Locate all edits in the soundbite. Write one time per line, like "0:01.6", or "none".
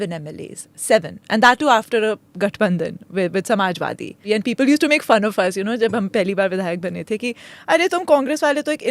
0:04.1